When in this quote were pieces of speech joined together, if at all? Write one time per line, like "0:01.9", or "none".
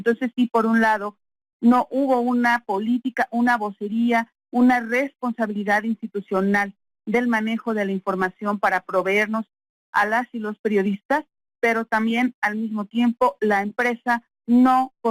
0:12.9